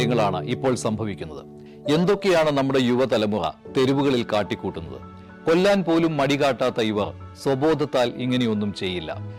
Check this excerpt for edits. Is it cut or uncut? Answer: uncut